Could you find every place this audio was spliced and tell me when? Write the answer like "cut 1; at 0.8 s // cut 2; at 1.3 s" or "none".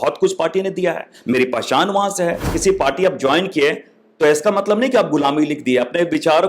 cut 1; at 2.5 s

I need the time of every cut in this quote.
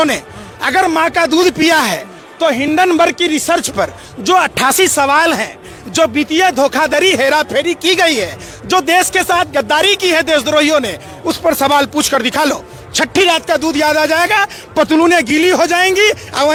none

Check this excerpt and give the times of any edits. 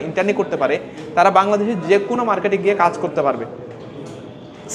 none

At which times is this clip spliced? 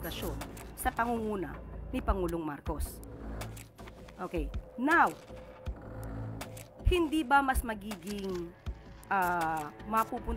cut 1; at 2.8 s // cut 2; at 4.2 s // cut 3; at 5.2 s // cut 4; at 6.8 s

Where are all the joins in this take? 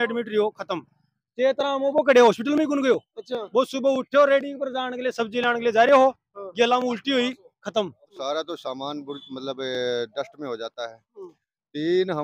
cut 1; at 8.1 s

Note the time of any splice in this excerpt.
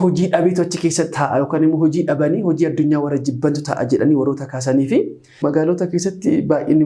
cut 1; at 5.4 s

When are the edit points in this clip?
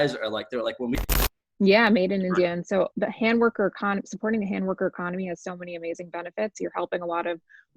cut 1; at 1.0 s

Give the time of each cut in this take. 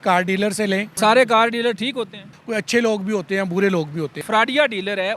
cut 1; at 0.9 s // cut 2; at 2.4 s // cut 3; at 4.2 s

